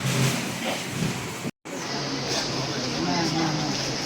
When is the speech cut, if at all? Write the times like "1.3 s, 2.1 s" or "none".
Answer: 1.6 s